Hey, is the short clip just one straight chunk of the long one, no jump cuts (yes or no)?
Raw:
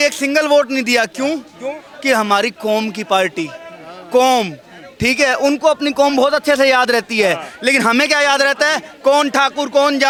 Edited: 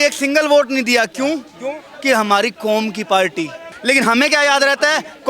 no